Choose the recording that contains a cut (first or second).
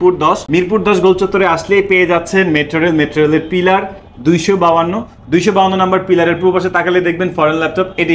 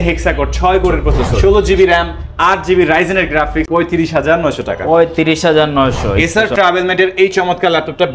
second